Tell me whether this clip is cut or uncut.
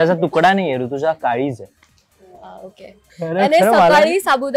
cut